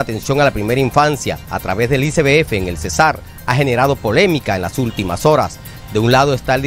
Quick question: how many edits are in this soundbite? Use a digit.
0